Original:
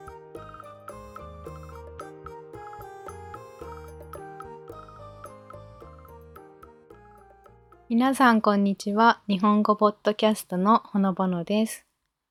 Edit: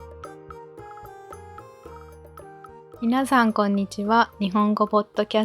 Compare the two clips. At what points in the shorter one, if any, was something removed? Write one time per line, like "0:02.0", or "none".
0:03.0